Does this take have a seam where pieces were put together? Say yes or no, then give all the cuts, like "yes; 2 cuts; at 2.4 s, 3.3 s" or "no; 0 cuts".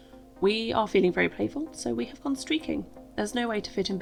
no; 0 cuts